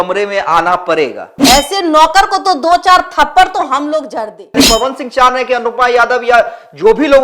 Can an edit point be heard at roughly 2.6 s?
no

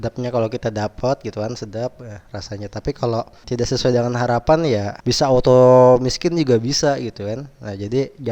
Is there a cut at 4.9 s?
yes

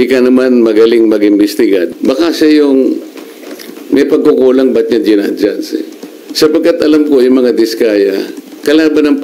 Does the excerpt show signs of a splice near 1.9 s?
yes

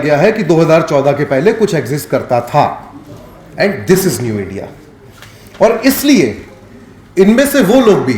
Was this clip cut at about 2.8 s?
no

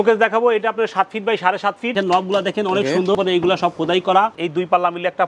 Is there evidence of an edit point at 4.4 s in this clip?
yes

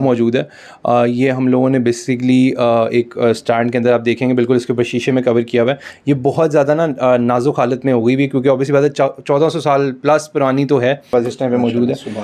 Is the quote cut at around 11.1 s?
yes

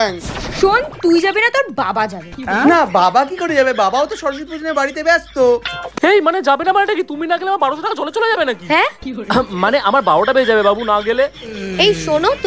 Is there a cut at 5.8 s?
yes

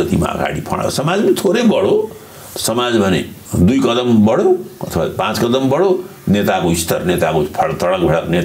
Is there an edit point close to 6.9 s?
no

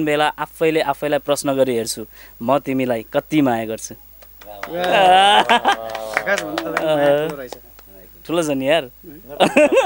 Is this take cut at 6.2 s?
no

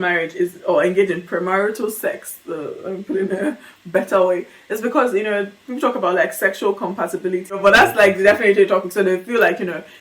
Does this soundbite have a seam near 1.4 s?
no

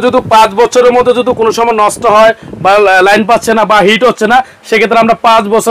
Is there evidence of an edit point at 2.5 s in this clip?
no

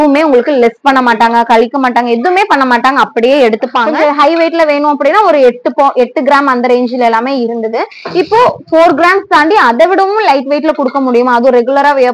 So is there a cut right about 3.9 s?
yes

